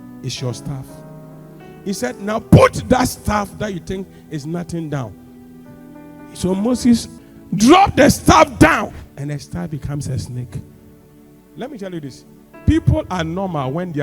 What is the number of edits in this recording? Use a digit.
2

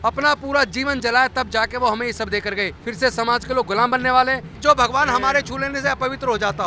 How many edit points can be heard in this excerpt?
2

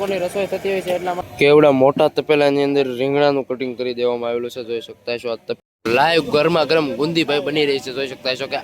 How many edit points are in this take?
2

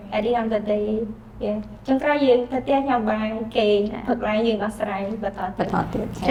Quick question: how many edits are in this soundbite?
0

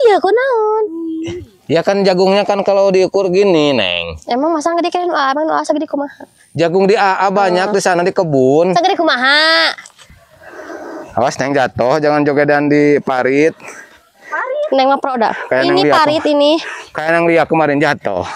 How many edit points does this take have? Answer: 1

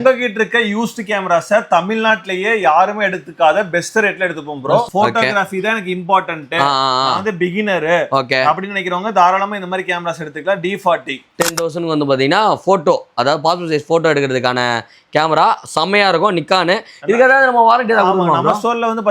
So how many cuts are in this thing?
2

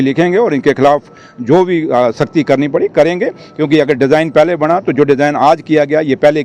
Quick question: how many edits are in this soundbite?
0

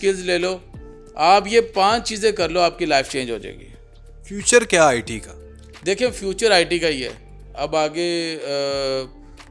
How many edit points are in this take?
0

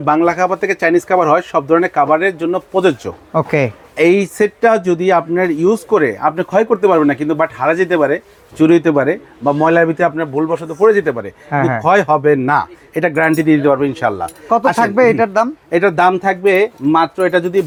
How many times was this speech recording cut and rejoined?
0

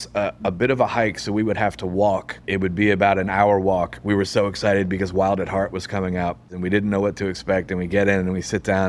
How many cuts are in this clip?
3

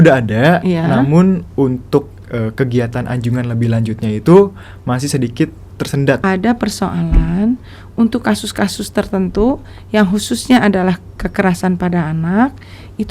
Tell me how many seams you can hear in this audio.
1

